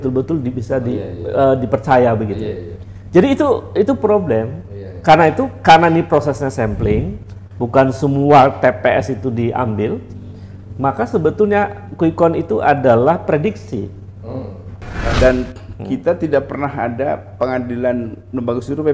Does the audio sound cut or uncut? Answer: cut